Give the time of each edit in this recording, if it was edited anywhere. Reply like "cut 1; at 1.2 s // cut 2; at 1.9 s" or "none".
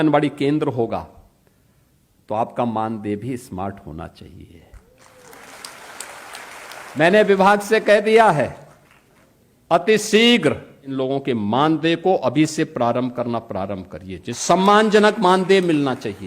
cut 1; at 6.9 s // cut 2; at 10.8 s // cut 3; at 14.4 s